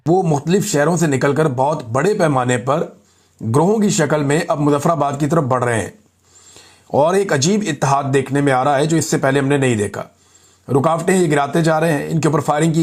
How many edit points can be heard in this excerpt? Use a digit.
0